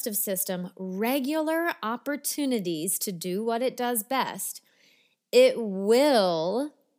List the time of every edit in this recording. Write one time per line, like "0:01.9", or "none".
none